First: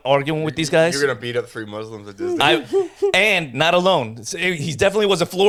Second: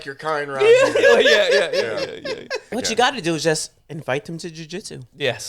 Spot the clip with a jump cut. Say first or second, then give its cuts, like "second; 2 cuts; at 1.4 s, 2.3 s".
second; 1 cut; at 2.7 s